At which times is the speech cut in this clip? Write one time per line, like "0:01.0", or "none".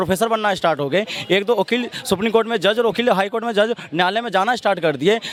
none